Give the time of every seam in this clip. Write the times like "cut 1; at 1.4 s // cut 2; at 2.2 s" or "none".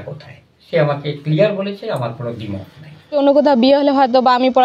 cut 1; at 3.2 s